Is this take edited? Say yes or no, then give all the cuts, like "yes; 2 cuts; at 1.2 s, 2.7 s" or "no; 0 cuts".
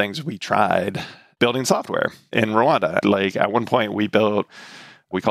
no; 0 cuts